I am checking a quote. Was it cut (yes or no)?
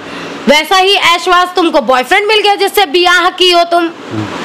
no